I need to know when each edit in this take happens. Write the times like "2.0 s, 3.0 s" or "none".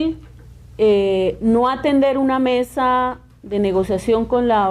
1.5 s